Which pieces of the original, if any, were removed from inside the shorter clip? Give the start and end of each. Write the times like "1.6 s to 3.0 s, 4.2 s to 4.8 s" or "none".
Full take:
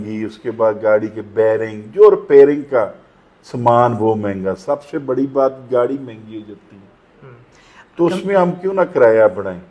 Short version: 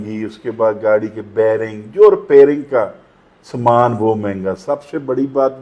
none